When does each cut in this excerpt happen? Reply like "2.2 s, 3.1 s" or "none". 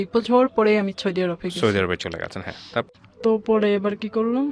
2.9 s